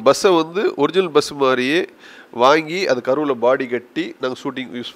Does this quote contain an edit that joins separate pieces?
no; 0 cuts

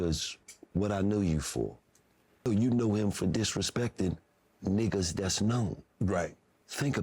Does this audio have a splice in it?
yes; 1 cut; at 2.5 s

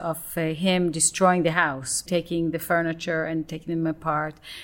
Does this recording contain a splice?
yes; 1 cut; at 2.0 s

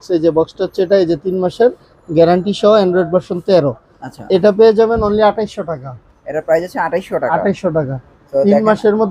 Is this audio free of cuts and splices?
yes; 0 cuts

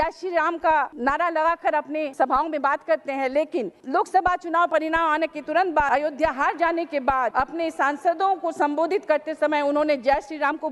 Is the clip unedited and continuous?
no; 5 cuts; at 0.9 s, 2.1 s, 3.8 s, 5.9 s, 7.3 s

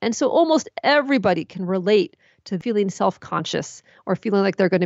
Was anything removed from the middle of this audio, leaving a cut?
yes; 1 cut; at 2.6 s

